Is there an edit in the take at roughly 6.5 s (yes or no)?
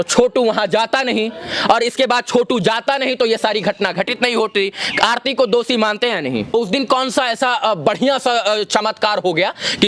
yes